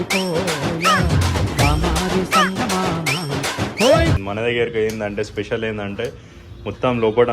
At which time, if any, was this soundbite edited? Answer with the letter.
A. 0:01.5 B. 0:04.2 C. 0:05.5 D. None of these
B